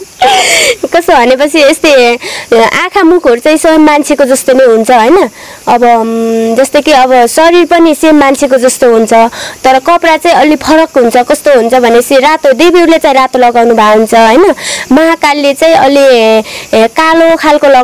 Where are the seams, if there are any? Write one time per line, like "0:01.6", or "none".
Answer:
none